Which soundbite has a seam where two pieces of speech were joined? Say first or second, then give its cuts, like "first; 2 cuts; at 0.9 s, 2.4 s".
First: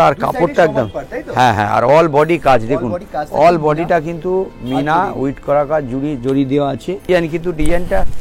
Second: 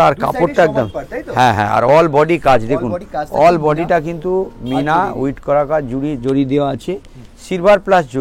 first; 1 cut; at 7.1 s